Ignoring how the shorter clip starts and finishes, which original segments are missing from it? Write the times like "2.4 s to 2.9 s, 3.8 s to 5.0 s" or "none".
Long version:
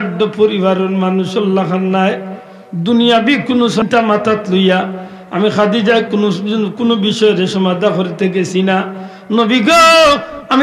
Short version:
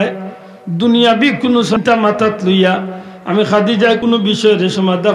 6.1 s to 6.8 s